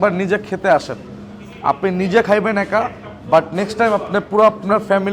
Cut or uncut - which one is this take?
uncut